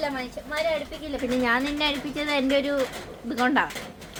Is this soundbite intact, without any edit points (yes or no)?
yes